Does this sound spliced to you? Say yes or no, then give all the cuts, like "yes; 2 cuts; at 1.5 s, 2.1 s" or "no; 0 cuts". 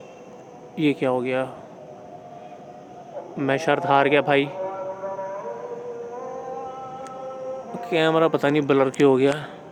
no; 0 cuts